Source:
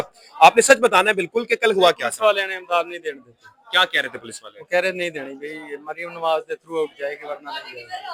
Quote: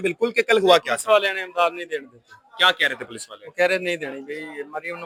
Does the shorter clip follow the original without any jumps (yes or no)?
yes